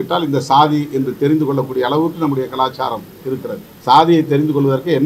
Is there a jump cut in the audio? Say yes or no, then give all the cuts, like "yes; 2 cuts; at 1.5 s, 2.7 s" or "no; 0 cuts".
yes; 1 cut; at 3.7 s